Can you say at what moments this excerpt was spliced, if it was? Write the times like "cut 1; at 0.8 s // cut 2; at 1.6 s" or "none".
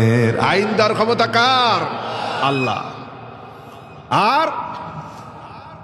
none